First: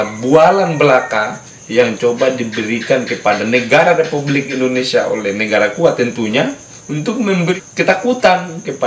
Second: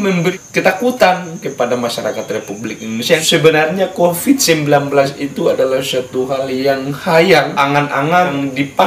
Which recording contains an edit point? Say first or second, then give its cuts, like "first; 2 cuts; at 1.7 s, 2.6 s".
second; 1 cut; at 3.2 s